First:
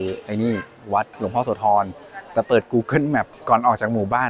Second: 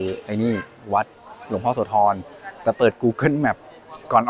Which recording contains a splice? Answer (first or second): first